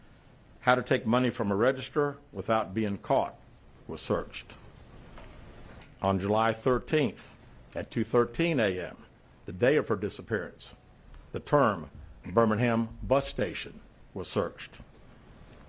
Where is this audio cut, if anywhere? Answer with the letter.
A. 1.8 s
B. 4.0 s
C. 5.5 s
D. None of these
B